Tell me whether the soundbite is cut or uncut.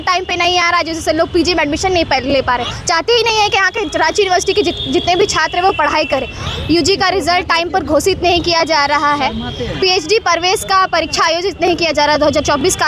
cut